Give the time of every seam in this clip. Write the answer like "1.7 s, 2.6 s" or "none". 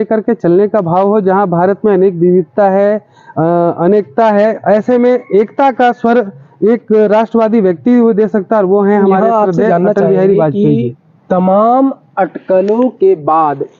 none